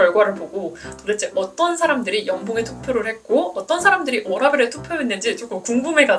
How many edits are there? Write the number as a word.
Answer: zero